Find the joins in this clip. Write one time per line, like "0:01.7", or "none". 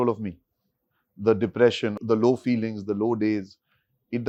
none